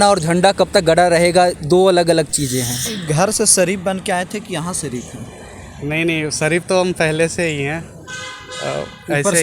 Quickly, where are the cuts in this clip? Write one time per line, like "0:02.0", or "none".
0:02.9